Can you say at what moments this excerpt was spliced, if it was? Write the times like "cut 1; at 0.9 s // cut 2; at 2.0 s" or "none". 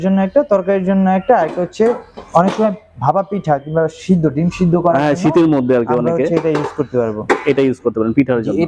none